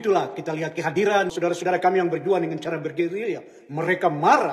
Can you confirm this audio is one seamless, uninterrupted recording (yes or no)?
no